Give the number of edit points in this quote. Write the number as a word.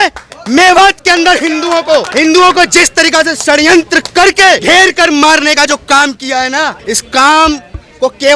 two